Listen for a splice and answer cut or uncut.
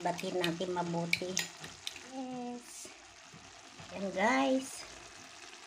cut